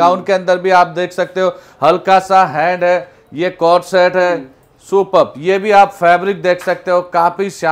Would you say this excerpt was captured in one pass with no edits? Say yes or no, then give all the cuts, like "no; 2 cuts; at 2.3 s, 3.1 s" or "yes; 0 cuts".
yes; 0 cuts